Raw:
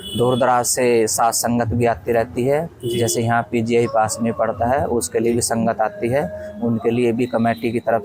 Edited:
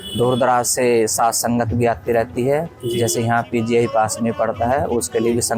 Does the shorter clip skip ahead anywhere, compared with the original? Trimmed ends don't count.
no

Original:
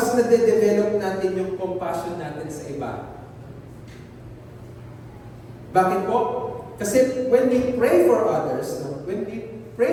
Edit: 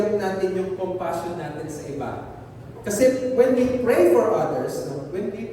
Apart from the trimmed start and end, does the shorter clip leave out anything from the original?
yes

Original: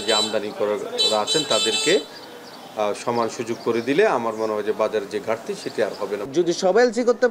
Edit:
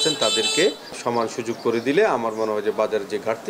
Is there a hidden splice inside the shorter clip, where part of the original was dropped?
yes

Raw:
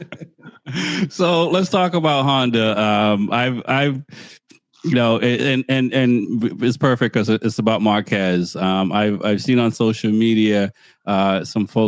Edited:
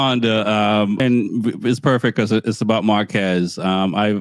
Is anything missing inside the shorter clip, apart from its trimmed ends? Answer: yes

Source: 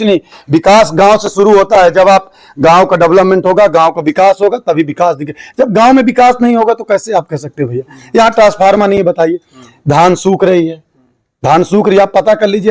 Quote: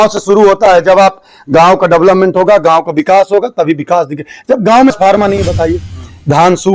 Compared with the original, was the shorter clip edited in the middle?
yes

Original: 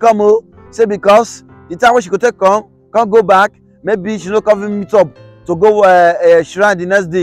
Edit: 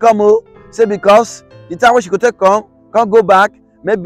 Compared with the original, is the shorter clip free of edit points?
yes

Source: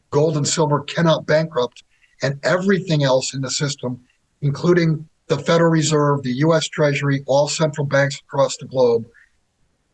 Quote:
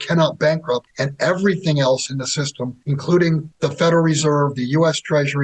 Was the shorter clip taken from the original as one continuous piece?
no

